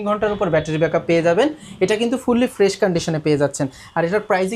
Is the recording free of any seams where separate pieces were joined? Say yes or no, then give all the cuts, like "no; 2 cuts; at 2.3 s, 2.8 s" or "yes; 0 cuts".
yes; 0 cuts